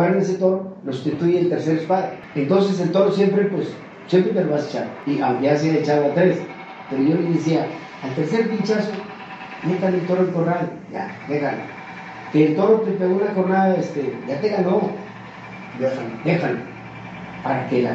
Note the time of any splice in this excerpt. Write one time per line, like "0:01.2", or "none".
0:02.2
0:04.9